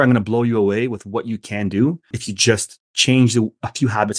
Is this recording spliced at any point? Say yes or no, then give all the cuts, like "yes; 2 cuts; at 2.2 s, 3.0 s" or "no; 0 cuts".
yes; 1 cut; at 2.2 s